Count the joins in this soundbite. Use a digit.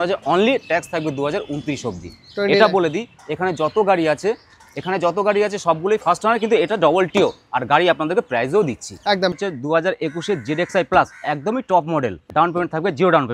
2